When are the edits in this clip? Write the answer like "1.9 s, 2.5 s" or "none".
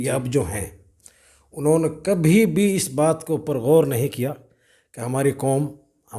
none